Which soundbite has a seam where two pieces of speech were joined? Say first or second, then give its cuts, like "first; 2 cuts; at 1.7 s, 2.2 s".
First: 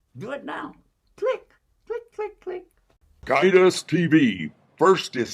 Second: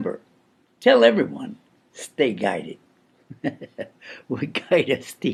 first; 1 cut; at 3.2 s